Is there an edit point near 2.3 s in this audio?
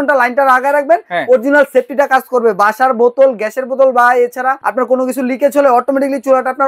no; 1 cut; at 4.6 s

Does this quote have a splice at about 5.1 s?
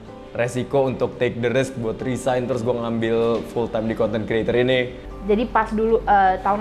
yes; 1 cut; at 5.1 s

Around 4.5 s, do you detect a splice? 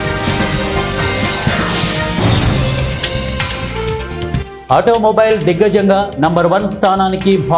yes; 1 cut; at 4.5 s

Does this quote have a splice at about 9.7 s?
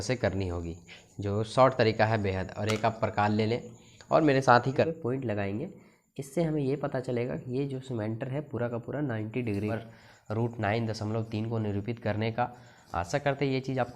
yes; 2 cuts; at 4.9 s, 9.7 s

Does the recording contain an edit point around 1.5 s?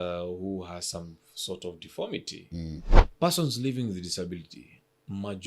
no; 1 cut; at 3.0 s

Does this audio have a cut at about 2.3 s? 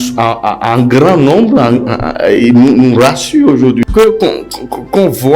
no; 1 cut; at 3.8 s

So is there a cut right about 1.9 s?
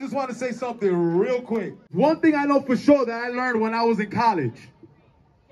yes; 1 cut; at 1.9 s

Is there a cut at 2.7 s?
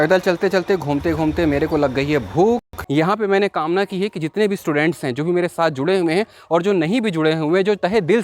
yes; 1 cut; at 2.7 s

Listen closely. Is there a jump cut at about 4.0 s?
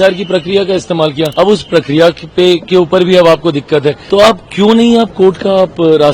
yes; 2 cuts; at 1.3 s, 4.0 s

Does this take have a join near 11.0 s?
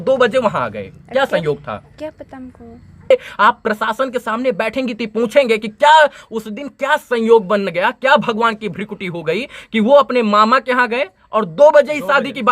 no; 1 cut; at 3.1 s

